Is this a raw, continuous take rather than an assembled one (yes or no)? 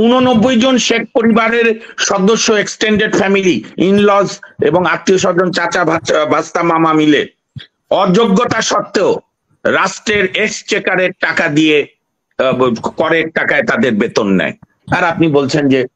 yes